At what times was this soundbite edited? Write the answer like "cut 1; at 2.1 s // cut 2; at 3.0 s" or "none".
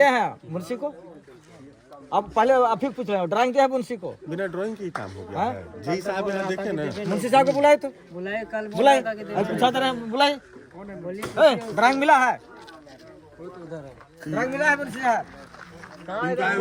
none